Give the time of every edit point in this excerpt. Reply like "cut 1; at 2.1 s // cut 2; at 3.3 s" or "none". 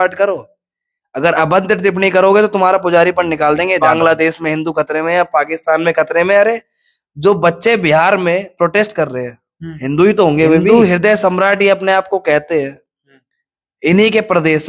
cut 1; at 3.8 s // cut 2; at 10.6 s